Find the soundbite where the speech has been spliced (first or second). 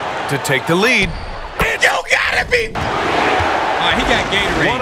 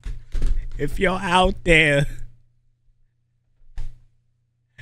first